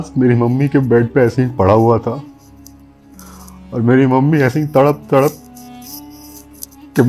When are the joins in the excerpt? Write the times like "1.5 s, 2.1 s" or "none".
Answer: 2.2 s, 3.7 s

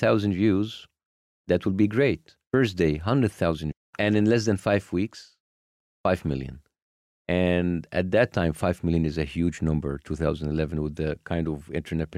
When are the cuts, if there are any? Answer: 2.3 s, 3.9 s

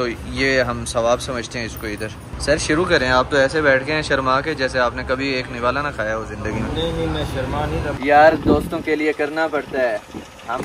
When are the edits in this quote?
2.3 s, 7.9 s

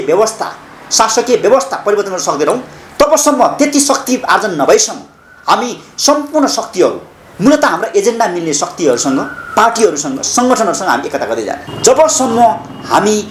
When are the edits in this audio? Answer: 11.7 s

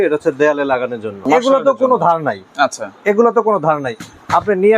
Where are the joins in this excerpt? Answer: 1.2 s

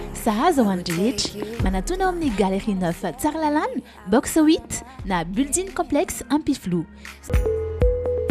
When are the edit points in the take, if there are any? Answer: 7.3 s

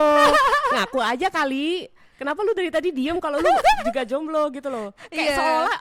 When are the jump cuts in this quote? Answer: none

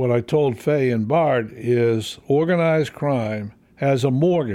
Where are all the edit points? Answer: none

